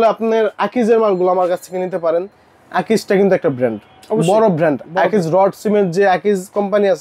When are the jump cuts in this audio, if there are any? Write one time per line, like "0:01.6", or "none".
none

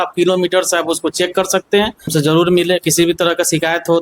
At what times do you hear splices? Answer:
0:02.1

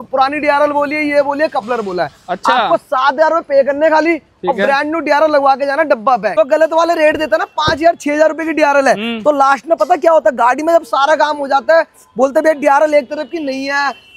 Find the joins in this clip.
0:06.3

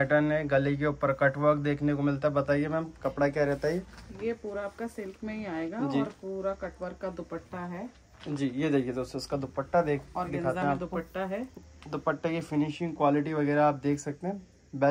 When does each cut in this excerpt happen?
none

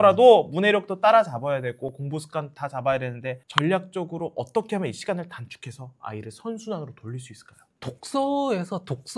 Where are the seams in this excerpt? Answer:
none

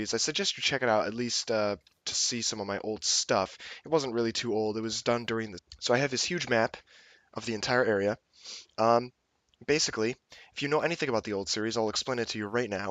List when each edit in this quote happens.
none

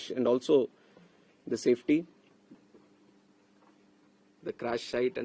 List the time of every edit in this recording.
0:02.6

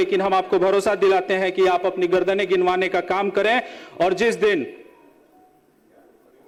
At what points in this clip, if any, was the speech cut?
none

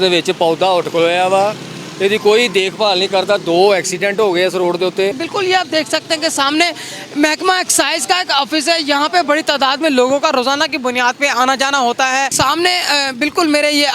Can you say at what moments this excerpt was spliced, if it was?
0:05.2
0:12.3

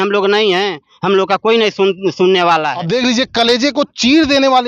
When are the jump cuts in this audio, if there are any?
0:02.8

